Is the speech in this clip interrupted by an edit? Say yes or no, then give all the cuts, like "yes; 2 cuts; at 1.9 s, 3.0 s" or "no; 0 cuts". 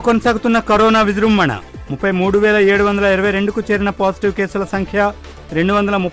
no; 0 cuts